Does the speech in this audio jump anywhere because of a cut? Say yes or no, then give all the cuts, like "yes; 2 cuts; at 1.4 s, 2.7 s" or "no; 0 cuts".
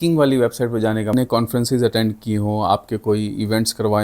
yes; 1 cut; at 1.1 s